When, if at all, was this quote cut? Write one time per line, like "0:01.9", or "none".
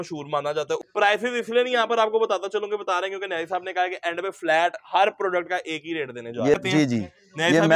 0:00.9
0:06.5